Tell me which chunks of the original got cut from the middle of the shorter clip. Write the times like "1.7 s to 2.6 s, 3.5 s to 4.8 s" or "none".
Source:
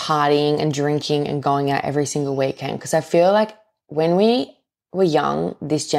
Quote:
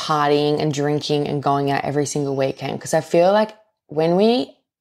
none